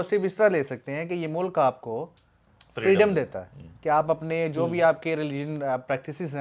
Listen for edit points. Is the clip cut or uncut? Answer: uncut